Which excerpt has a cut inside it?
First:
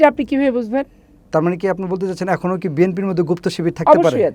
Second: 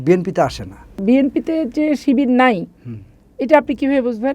second; 1 cut; at 1.0 s

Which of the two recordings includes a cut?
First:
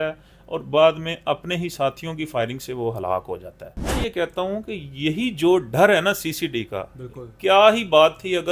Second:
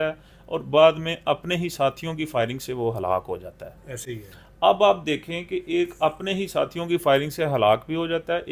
first; 1 cut; at 4.0 s

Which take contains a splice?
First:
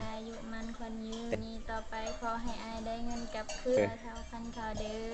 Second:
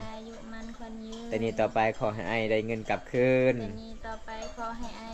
first; 2 cuts; at 1.3 s, 3.8 s

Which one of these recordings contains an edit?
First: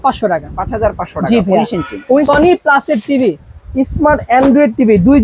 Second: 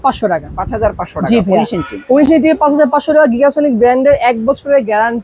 first; 1 cut; at 2.2 s

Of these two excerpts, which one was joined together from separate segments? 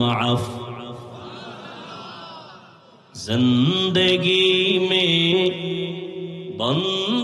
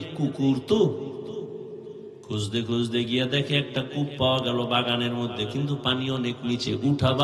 first; 1 cut; at 3.1 s

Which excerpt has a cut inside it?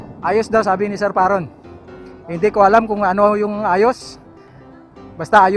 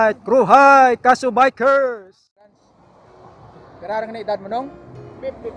second; 1 cut; at 2.5 s

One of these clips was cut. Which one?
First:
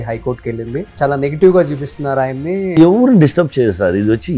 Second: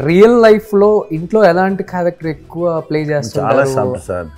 first; 2 cuts; at 0.9 s, 2.7 s

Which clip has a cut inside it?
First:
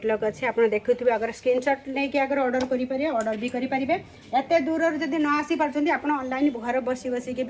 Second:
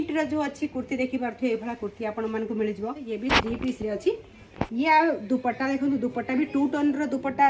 second; 1 cut; at 3.1 s

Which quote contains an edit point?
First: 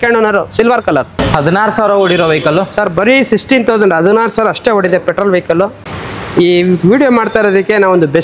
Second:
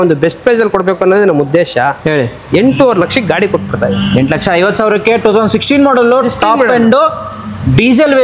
first; 2 cuts; at 1.1 s, 5.8 s

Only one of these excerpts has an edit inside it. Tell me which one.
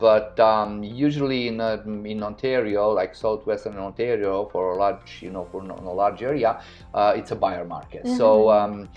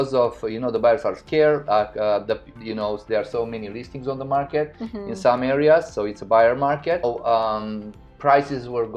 second; 1 cut; at 7.1 s

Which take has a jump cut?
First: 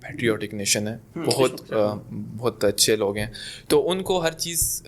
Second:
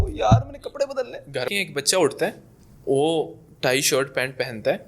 second; 1 cut; at 1.5 s

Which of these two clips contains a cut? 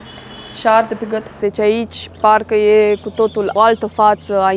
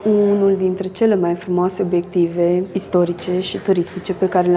first; 2 cuts; at 1.4 s, 3.5 s

